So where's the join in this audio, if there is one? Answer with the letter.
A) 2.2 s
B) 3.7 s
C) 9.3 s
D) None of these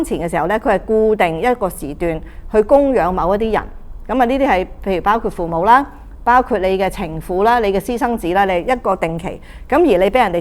D